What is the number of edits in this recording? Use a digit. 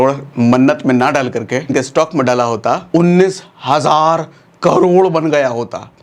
2